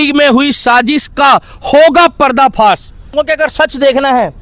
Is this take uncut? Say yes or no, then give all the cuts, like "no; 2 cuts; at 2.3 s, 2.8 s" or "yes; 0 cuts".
no; 1 cut; at 3.1 s